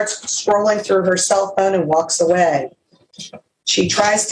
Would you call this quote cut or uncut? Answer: uncut